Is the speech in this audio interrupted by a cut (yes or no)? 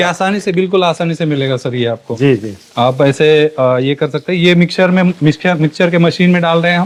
no